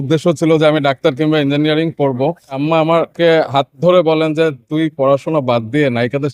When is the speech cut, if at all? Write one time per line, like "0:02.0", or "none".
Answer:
0:02.6

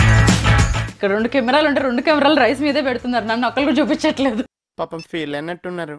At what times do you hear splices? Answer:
0:04.4

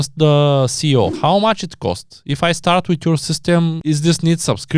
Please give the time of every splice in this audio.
0:01.2
0:03.8

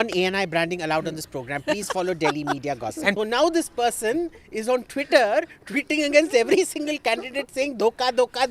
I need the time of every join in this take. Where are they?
0:03.1

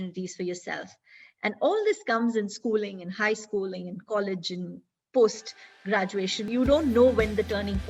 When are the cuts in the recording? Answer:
none

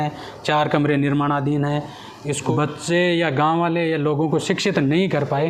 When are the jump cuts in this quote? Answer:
0:02.5

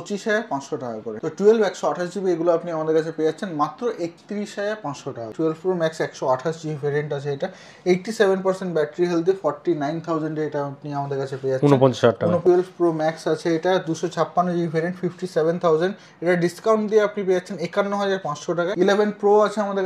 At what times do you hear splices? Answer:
0:01.1
0:05.3
0:12.4
0:18.7

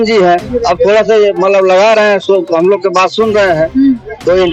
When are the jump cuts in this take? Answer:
none

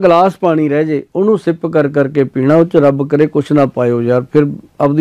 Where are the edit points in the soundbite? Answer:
none

